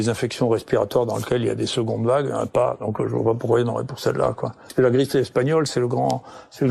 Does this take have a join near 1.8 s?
no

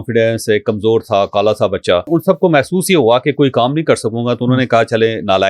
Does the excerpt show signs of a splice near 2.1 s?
yes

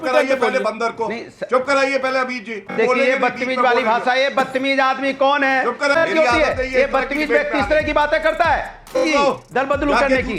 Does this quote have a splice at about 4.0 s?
no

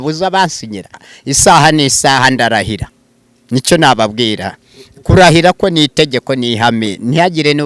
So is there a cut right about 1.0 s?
yes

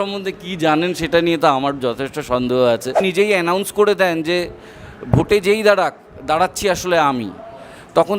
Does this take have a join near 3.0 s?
yes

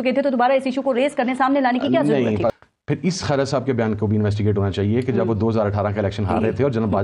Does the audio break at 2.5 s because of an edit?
yes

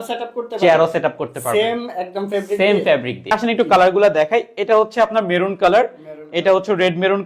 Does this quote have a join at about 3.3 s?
yes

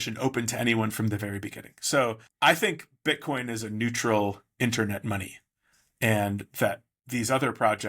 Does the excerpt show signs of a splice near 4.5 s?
no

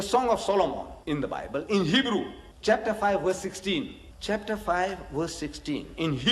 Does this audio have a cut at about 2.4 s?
yes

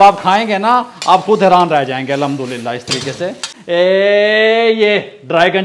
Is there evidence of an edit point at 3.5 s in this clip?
yes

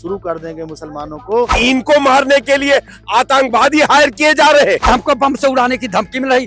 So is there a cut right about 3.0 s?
no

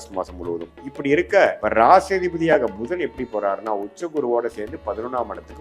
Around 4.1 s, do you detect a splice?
no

